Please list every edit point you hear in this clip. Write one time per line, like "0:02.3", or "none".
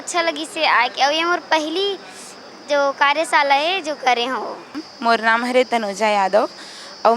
0:04.9